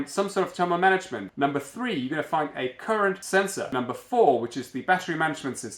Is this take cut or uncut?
cut